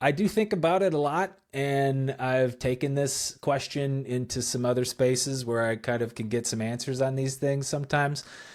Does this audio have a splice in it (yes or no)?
no